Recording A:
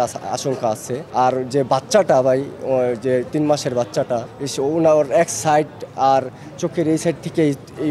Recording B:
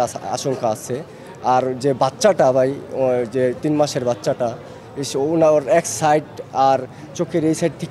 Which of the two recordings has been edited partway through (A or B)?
A